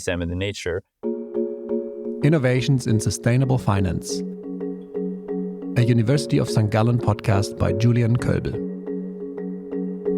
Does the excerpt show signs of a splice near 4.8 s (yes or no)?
no